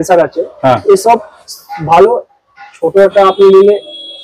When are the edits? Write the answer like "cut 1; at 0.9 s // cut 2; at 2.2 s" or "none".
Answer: none